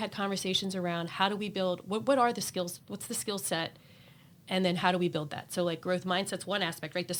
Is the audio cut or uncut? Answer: uncut